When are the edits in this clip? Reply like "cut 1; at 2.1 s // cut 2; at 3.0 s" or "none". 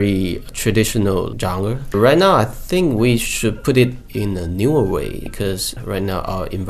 cut 1; at 1.9 s